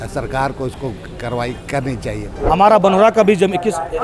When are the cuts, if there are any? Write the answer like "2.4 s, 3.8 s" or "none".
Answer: 2.3 s